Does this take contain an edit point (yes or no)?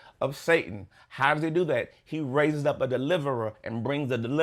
no